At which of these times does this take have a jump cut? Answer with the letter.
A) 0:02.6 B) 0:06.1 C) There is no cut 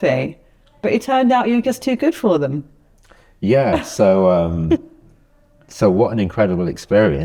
C